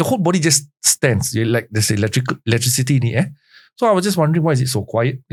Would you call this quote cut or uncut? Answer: uncut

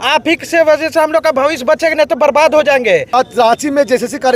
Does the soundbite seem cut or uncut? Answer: cut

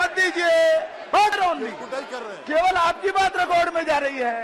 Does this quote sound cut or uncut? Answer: cut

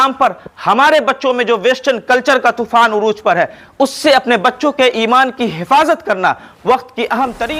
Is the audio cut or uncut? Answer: uncut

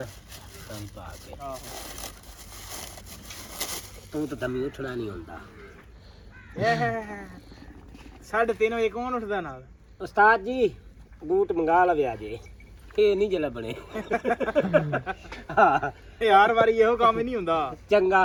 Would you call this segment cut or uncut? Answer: uncut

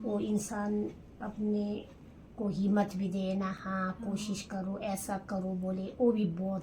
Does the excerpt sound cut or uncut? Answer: uncut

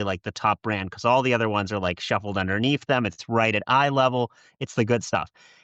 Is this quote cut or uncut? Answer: uncut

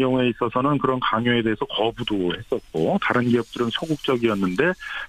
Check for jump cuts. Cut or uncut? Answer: cut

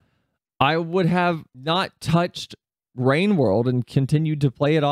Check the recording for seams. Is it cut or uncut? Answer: cut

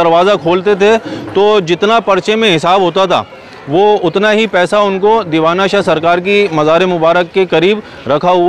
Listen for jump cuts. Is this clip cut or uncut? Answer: uncut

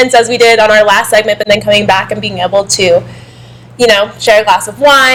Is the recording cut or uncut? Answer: uncut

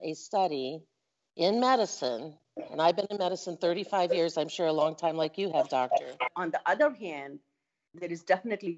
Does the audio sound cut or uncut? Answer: cut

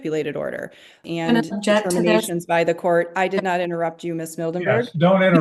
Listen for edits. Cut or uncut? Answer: cut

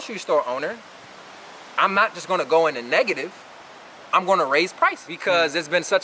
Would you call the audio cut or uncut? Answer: cut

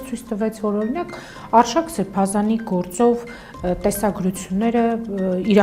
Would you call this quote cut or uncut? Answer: uncut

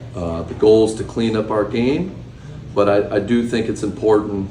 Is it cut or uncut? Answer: cut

